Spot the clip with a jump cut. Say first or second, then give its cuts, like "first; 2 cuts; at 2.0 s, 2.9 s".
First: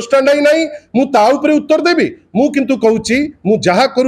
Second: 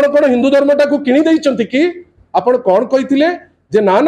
second; 1 cut; at 2.2 s